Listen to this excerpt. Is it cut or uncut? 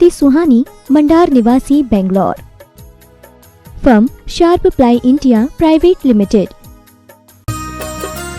cut